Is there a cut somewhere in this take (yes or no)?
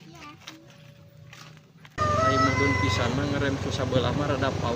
yes